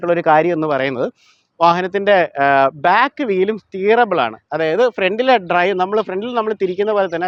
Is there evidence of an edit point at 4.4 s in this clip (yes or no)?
no